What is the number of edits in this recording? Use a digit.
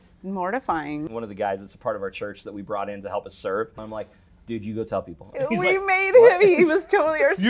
2